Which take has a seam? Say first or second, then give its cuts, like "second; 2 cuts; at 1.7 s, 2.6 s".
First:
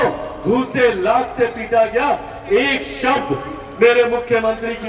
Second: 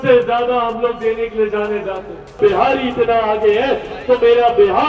second; 1 cut; at 2.4 s